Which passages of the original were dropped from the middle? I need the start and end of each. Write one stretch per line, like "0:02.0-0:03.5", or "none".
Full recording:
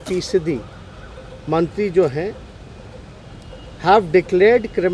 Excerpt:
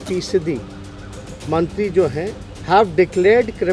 0:02.5-0:03.6